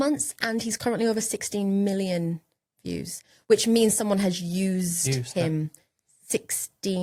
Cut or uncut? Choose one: uncut